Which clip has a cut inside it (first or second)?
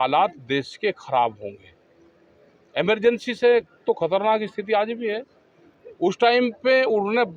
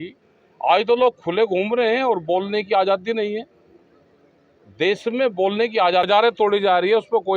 second